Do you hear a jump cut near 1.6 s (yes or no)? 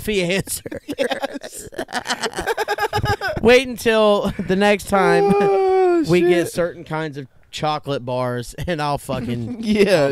yes